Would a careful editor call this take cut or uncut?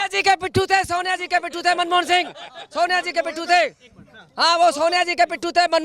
uncut